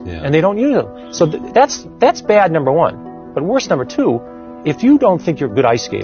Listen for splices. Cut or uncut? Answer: uncut